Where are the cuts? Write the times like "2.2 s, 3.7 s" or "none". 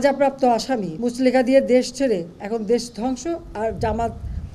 0.9 s